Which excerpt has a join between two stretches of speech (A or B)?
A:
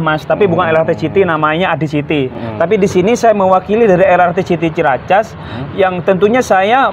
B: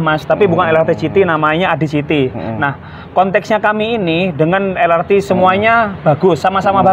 A